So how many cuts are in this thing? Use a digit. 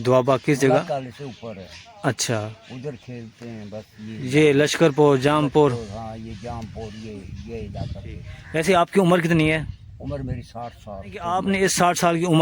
2